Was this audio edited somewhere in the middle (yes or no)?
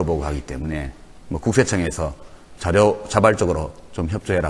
no